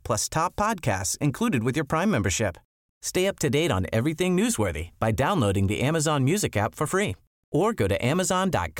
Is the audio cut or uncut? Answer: uncut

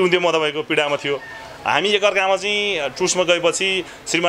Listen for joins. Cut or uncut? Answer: uncut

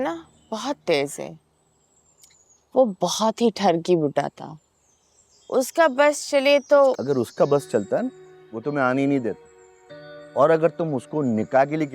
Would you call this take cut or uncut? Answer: uncut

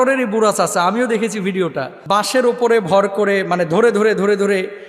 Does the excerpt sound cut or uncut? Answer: cut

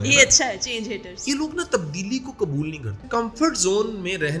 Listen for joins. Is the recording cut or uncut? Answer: cut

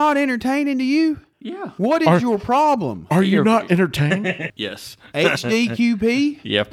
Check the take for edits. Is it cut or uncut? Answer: cut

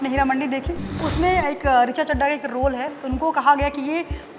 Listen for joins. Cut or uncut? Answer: cut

